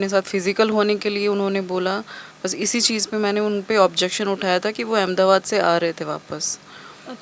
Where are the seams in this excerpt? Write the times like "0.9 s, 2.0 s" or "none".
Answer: none